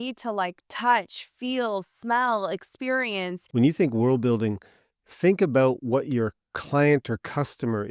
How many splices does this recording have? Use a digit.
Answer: 1